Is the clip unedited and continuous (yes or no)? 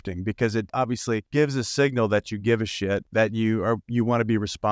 no